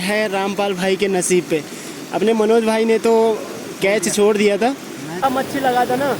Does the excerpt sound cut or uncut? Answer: cut